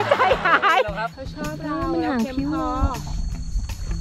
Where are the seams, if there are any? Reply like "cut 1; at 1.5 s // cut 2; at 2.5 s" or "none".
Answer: cut 1; at 1.0 s